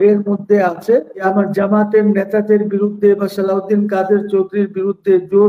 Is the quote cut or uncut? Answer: cut